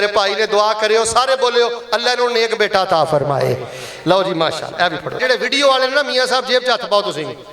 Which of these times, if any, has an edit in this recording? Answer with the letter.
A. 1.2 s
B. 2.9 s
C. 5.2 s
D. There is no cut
C